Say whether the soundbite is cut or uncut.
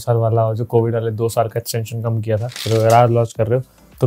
cut